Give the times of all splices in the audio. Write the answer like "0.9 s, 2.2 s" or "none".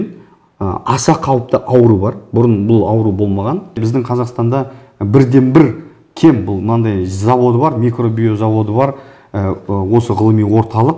3.7 s